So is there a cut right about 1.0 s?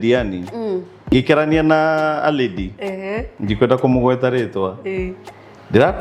yes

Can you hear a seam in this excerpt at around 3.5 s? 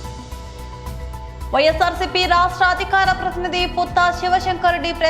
no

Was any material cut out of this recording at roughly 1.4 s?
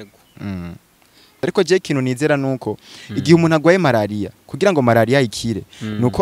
yes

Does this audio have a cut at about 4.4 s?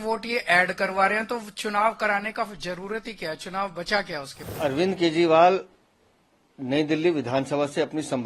yes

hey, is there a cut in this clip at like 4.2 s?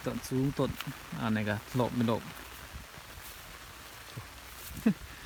no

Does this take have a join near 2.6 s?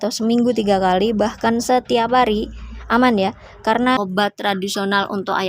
no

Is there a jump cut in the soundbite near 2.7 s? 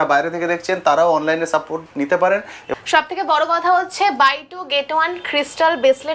yes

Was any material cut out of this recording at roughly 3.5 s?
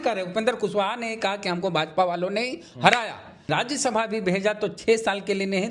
yes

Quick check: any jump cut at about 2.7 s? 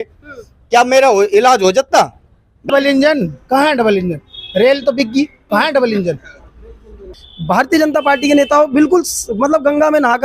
yes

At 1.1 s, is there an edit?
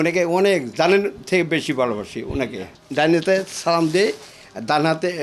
no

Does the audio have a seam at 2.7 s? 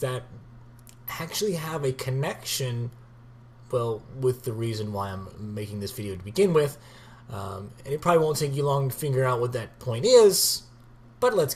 no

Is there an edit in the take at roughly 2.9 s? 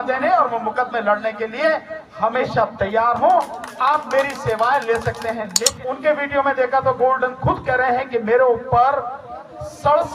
no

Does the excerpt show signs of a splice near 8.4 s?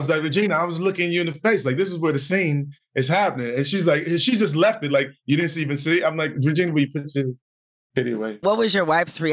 yes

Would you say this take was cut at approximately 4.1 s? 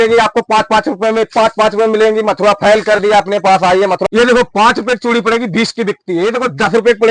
yes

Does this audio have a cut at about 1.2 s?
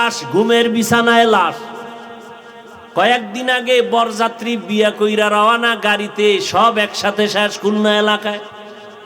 no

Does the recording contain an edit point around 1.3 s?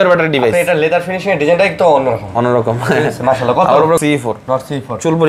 no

